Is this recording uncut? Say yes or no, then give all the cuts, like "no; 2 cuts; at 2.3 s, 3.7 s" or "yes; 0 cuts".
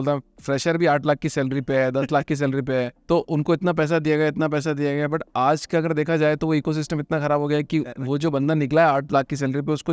yes; 0 cuts